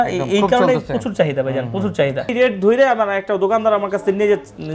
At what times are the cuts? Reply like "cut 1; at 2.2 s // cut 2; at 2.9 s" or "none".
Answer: cut 1; at 2.3 s